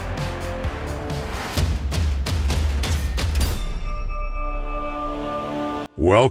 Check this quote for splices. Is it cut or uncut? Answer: uncut